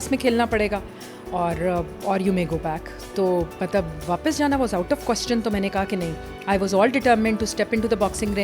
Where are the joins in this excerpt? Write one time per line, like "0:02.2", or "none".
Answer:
none